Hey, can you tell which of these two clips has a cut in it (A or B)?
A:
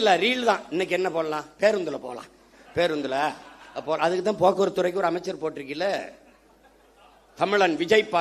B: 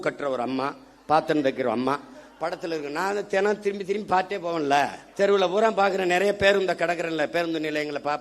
B